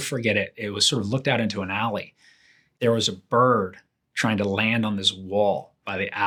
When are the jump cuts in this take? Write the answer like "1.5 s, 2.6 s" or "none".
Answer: none